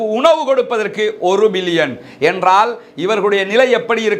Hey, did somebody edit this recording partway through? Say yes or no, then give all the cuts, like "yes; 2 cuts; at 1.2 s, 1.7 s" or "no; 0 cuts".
no; 0 cuts